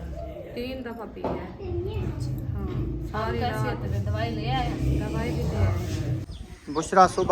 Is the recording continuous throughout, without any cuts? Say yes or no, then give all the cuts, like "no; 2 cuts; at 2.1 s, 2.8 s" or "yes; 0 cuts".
no; 1 cut; at 6.2 s